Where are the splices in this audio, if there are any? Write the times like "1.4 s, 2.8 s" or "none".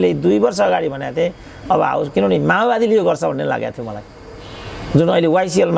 none